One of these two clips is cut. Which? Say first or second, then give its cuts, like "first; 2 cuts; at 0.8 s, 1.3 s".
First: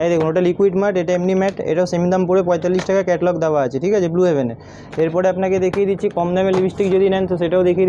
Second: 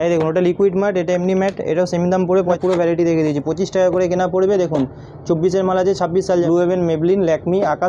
second; 2 cuts; at 2.6 s, 6.4 s